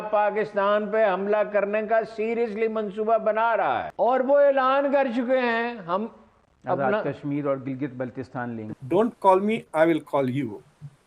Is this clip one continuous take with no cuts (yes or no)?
no